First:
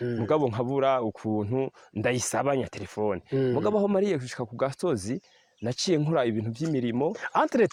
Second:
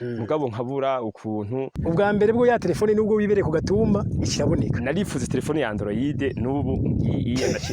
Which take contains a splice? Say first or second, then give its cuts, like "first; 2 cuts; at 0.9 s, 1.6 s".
second; 1 cut; at 1.7 s